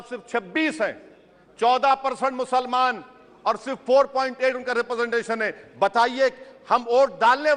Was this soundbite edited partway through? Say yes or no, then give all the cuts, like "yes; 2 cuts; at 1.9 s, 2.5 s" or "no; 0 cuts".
no; 0 cuts